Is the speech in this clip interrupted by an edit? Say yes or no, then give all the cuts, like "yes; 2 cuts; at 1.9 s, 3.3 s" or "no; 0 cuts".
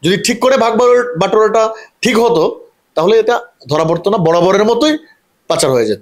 no; 0 cuts